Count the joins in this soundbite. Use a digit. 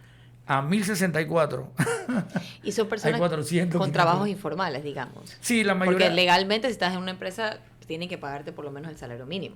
0